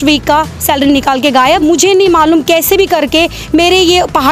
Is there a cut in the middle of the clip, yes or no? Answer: yes